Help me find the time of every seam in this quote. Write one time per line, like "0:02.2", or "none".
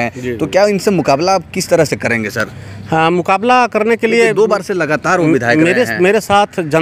none